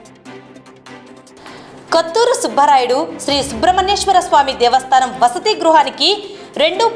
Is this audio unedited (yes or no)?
no